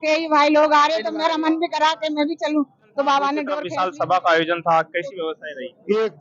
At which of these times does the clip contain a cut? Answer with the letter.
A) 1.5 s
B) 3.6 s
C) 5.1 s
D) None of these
B